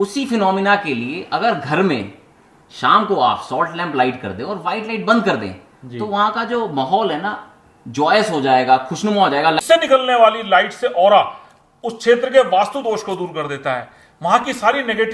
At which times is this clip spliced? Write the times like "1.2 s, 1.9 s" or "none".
9.6 s